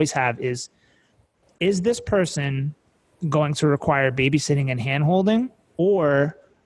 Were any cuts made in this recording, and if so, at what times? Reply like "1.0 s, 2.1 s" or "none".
5.6 s